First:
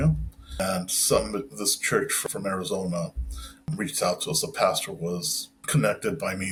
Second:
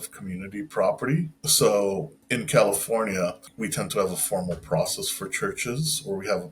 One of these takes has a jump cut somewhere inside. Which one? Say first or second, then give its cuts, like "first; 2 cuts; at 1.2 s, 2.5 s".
second; 2 cuts; at 1.4 s, 3.5 s